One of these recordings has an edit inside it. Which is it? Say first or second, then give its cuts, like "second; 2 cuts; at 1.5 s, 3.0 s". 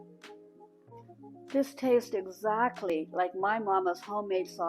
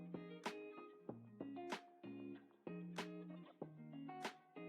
first; 1 cut; at 1.5 s